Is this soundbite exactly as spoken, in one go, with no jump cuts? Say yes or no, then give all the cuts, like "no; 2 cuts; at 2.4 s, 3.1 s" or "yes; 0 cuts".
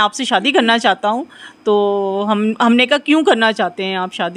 yes; 0 cuts